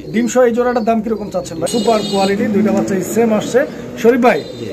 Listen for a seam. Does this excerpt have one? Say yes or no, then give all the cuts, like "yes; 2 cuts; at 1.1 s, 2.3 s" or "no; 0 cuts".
yes; 1 cut; at 1.6 s